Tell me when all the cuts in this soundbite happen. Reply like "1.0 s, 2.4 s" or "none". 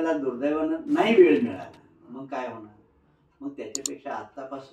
none